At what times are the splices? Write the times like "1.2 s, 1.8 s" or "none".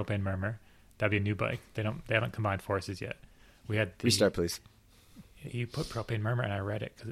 none